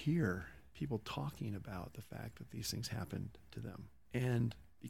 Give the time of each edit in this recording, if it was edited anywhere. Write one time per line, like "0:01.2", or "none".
none

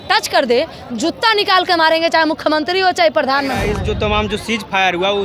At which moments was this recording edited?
0:03.7

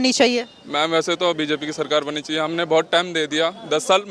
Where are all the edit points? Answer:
none

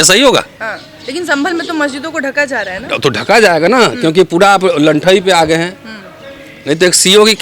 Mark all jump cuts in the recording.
none

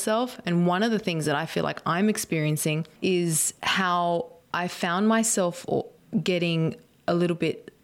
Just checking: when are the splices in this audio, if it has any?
0:02.9
0:06.0

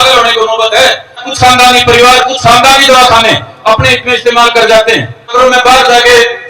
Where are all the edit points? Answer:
0:01.2
0:05.3

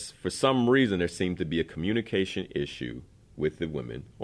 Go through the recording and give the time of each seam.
none

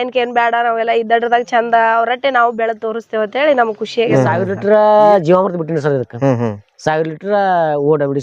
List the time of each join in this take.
0:04.3

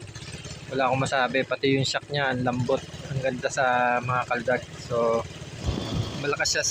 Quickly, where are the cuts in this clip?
0:05.6

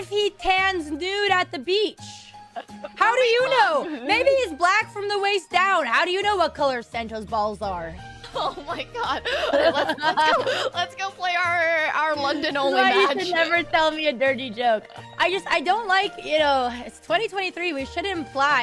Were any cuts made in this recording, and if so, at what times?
0:09.5

